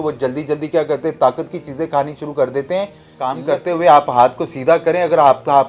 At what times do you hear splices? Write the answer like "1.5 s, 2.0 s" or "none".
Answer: 3.4 s